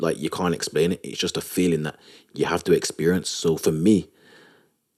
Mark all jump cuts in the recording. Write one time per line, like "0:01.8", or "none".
none